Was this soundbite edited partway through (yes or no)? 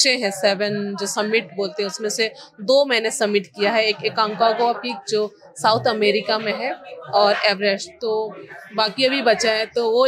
no